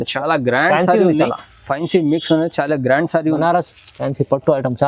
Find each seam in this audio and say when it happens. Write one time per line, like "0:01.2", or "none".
0:03.3